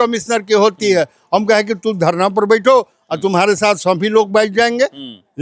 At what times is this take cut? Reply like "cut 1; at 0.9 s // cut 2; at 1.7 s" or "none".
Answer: none